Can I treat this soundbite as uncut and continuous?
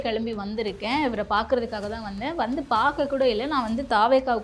yes; 0 cuts

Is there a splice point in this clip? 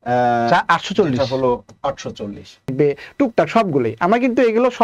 yes; 1 cut; at 2.7 s

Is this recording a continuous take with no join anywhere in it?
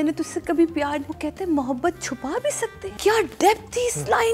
no; 2 cuts; at 1.1 s, 2.9 s

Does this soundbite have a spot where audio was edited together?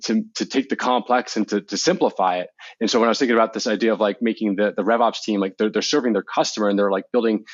no; 0 cuts

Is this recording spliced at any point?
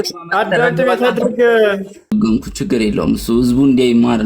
yes; 1 cut; at 2.0 s

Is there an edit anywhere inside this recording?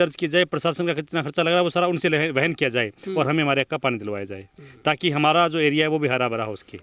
no; 0 cuts

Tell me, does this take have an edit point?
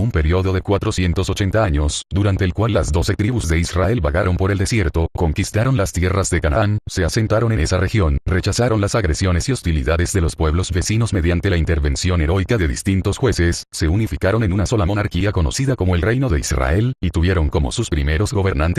no; 0 cuts

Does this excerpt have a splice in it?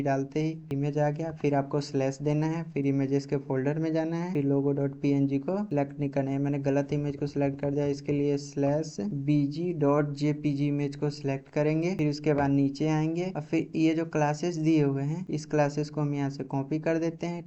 yes; 1 cut; at 15.3 s

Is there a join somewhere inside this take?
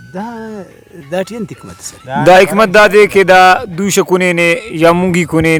no; 0 cuts

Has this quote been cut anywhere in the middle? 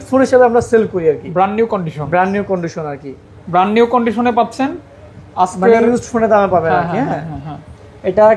no; 0 cuts

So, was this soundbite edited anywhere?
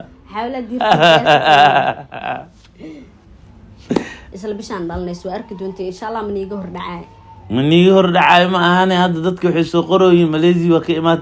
yes; 1 cut; at 4.2 s

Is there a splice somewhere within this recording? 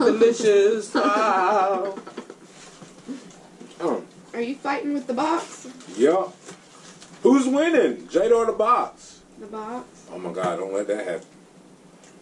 no; 0 cuts

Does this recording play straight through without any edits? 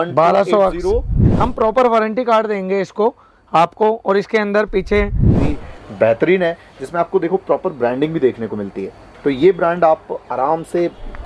no; 2 cuts; at 1.3 s, 5.4 s

